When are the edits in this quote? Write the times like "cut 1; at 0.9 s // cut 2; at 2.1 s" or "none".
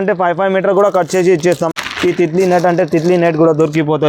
cut 1; at 1.7 s